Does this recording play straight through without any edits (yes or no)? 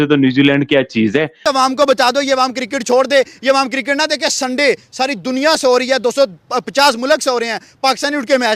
no